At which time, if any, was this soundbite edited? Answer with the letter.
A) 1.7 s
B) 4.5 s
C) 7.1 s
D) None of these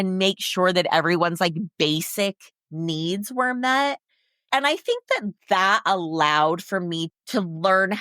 C